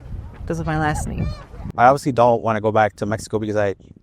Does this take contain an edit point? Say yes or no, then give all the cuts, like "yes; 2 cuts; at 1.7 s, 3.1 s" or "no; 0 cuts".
yes; 1 cut; at 1.6 s